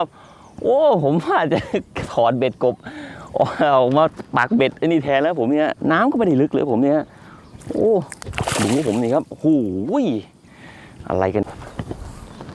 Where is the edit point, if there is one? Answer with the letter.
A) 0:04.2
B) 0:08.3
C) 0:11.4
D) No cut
C